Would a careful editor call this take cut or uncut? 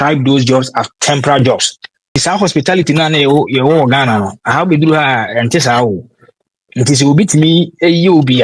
cut